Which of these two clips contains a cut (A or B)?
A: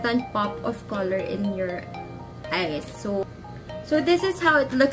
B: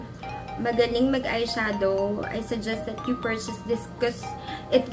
A